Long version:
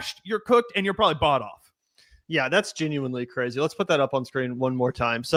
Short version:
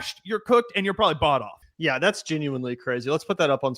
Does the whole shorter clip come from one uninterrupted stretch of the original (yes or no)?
no